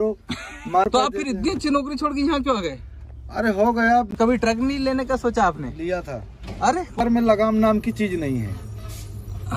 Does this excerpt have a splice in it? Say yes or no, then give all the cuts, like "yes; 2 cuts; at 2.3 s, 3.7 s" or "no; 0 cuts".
yes; 3 cuts; at 0.8 s, 4.1 s, 7.0 s